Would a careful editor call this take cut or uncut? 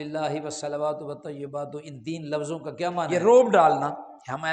cut